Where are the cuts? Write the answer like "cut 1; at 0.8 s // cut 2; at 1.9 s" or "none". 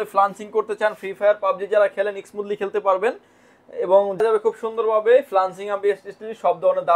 cut 1; at 4.2 s